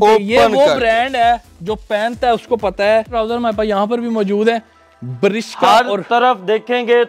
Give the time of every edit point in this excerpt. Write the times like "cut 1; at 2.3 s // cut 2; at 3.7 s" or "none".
cut 1; at 3.1 s